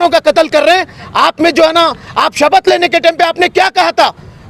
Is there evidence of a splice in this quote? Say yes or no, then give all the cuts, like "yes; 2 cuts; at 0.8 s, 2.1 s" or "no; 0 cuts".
no; 0 cuts